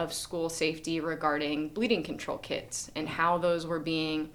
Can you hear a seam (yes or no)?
no